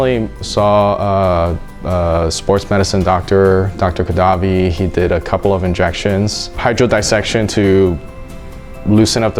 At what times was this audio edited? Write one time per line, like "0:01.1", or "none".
none